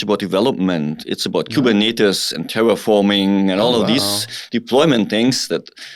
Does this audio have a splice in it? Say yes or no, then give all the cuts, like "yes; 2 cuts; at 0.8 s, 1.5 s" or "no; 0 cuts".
no; 0 cuts